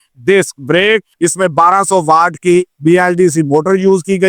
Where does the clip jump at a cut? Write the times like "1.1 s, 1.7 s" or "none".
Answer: 1.1 s

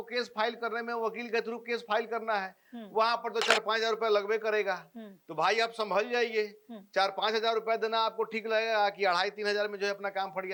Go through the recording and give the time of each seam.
none

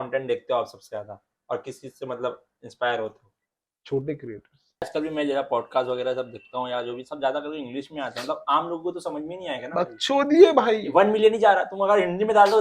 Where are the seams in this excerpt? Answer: 4.9 s

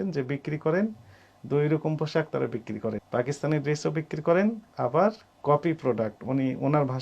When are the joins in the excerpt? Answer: 3.0 s

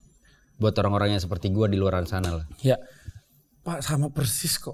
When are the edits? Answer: none

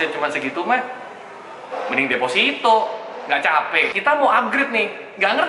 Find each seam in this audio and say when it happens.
3.9 s

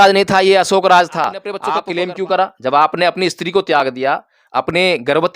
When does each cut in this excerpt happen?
1.5 s

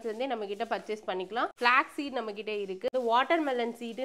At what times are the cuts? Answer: 1.5 s, 2.9 s

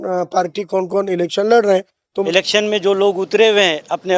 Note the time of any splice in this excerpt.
2.2 s

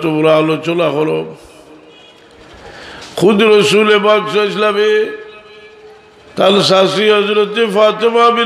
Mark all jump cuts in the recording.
none

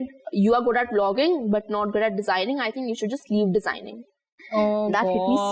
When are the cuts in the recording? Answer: none

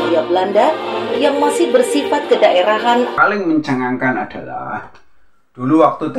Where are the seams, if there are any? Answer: 3.1 s

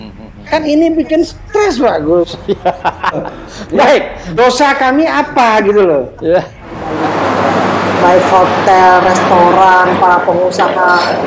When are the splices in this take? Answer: 3.2 s, 6.9 s

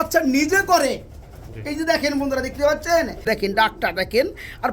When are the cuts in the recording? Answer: 3.3 s

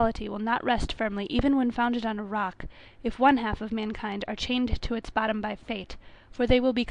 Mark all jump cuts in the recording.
none

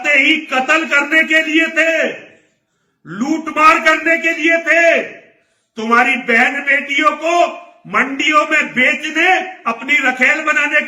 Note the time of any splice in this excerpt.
none

